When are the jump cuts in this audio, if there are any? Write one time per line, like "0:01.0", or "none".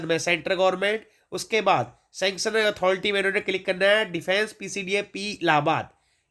none